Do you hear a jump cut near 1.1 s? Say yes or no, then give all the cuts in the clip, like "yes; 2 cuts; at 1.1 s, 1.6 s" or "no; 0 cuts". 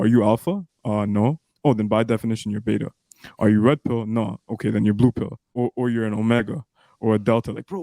no; 1 cut; at 5.5 s